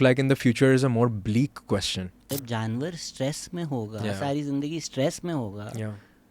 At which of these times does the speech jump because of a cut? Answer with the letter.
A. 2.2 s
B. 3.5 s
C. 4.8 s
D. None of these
A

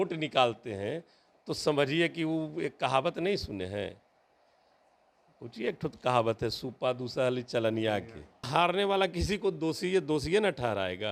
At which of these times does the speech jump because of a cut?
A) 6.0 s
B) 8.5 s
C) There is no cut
B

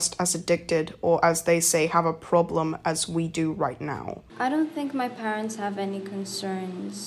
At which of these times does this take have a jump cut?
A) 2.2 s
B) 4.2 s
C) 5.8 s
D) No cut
B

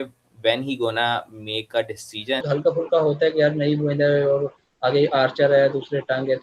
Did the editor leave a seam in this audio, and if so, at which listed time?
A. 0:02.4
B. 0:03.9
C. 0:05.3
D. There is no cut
A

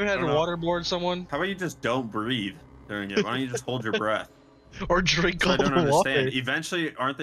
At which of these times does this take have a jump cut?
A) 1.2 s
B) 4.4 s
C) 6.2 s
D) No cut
A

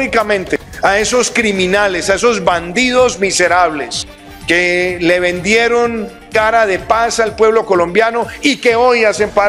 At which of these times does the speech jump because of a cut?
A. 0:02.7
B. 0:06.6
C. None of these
C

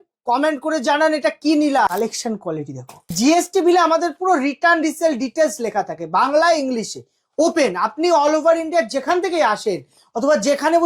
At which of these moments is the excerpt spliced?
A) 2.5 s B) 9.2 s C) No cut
A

